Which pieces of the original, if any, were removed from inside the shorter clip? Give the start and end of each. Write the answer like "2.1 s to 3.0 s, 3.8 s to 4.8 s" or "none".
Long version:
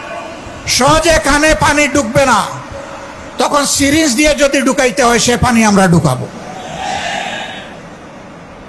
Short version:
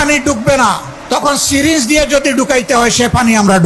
2.6 s to 3.2 s